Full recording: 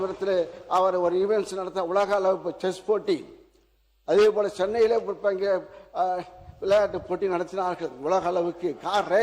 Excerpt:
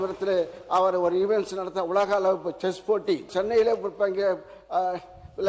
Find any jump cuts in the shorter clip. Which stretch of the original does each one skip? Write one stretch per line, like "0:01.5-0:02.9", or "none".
0:03.3-0:04.5